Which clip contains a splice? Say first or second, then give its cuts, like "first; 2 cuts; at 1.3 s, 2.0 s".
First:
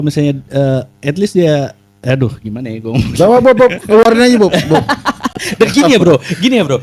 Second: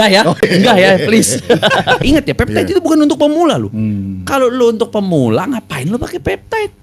second; 1 cut; at 2.0 s